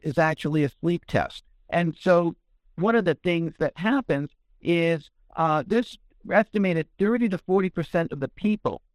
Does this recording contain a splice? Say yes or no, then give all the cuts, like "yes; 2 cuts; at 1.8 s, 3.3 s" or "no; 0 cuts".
no; 0 cuts